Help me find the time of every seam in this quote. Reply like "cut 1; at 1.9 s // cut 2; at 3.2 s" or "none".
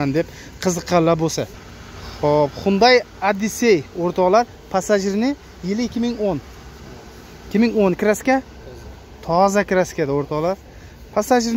none